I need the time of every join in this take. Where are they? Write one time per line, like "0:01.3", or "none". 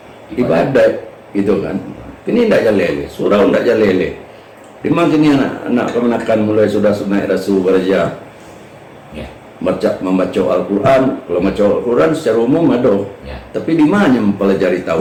none

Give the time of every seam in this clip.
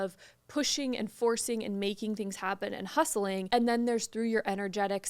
0:03.4

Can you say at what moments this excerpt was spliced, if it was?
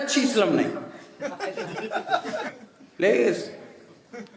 0:02.5

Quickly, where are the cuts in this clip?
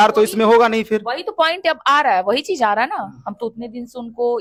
none

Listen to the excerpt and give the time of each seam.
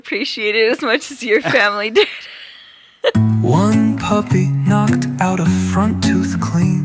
0:03.1

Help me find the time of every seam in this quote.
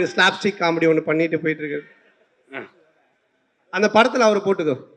none

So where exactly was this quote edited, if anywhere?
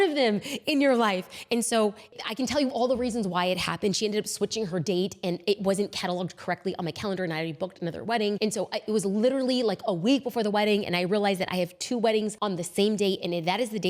none

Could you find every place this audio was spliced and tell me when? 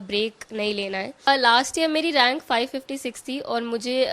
0:01.3

